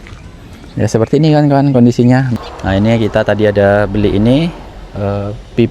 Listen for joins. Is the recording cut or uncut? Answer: cut